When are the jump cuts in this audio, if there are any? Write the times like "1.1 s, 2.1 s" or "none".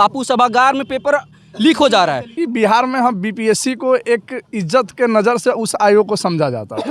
2.4 s